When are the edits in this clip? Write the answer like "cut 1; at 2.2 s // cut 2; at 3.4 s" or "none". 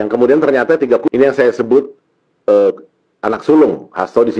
cut 1; at 1.0 s